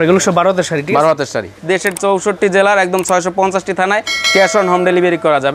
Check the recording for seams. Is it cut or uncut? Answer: cut